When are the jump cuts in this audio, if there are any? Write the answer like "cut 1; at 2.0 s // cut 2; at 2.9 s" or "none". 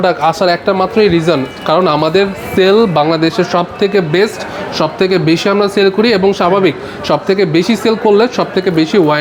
none

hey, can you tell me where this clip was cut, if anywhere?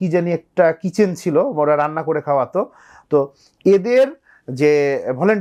none

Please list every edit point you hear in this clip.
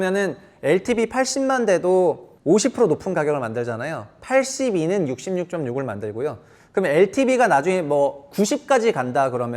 cut 1; at 2.3 s

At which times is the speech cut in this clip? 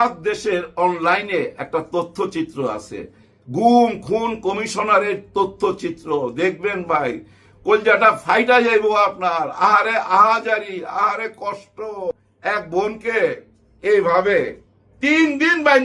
none

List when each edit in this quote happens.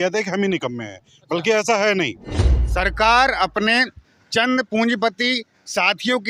none

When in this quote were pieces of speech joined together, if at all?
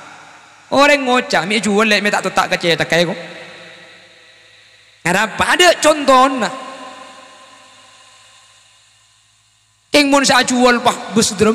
none

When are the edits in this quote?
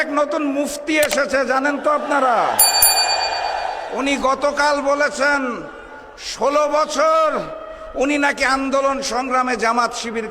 none

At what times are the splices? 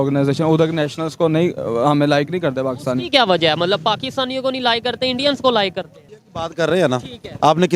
cut 1; at 5.9 s

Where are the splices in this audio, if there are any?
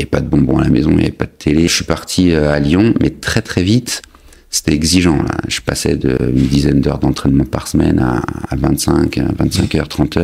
cut 1; at 1.7 s

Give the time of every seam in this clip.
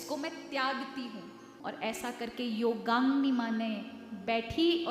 cut 1; at 1.5 s

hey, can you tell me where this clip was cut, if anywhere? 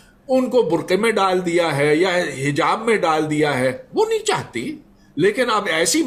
none

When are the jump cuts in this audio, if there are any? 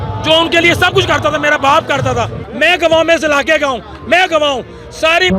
cut 1; at 2.4 s

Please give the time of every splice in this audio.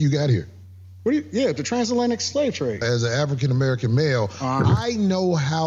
cut 1; at 2.8 s

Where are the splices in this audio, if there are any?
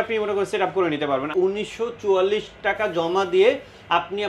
cut 1; at 1.3 s

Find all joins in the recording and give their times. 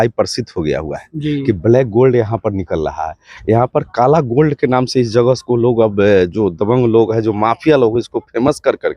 none

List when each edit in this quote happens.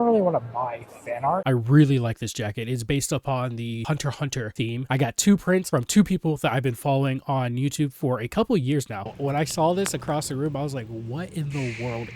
cut 1; at 1.3 s // cut 2; at 4.9 s // cut 3; at 9.0 s

